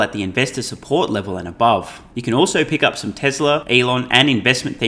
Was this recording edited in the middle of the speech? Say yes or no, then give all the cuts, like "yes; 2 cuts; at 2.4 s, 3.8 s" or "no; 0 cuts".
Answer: yes; 2 cuts; at 2.0 s, 3.6 s